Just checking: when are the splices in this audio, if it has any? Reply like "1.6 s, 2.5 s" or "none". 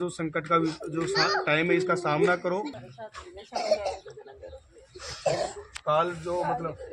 2.8 s